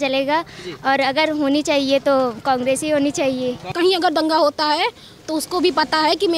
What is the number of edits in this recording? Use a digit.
1